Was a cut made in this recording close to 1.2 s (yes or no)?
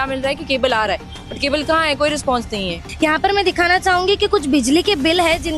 no